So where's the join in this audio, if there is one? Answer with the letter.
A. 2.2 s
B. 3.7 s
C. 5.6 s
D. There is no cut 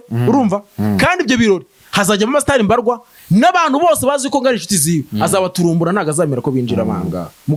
D